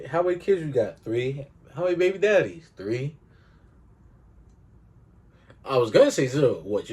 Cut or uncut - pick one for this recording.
uncut